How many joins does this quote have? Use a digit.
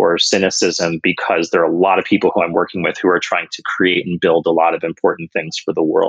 0